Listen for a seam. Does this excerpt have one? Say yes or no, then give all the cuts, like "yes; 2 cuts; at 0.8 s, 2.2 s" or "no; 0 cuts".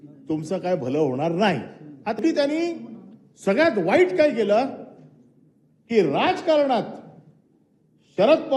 yes; 1 cut; at 2.2 s